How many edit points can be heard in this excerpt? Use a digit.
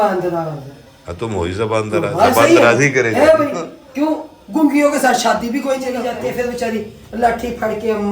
1